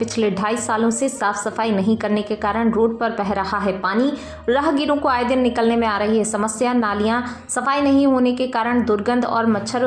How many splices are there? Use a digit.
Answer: 0